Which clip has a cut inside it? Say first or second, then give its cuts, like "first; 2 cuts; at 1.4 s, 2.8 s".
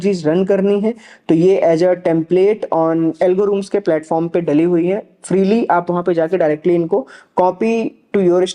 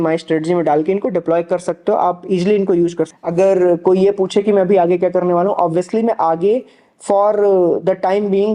second; 1 cut; at 3.1 s